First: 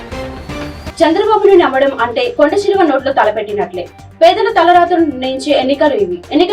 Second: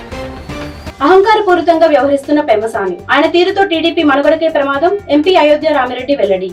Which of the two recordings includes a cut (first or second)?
first